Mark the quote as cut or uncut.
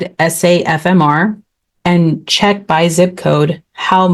uncut